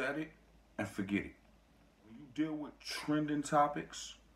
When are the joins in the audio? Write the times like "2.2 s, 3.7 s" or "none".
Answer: 2.2 s